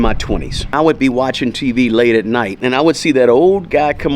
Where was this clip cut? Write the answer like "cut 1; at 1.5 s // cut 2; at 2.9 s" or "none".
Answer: cut 1; at 0.7 s // cut 2; at 2.5 s